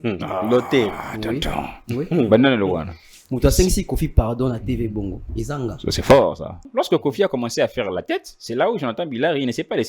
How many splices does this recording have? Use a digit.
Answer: 1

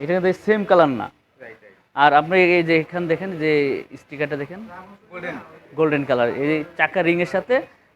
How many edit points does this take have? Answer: 0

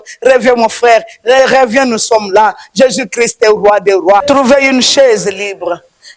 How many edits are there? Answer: 1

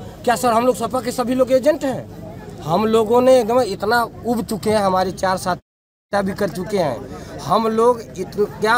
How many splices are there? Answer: 0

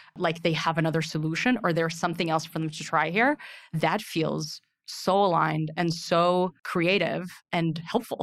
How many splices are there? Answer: 1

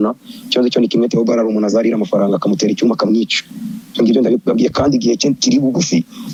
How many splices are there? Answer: 0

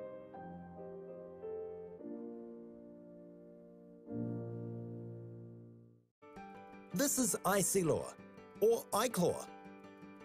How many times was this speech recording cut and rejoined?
1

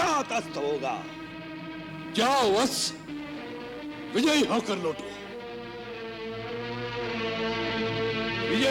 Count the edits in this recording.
0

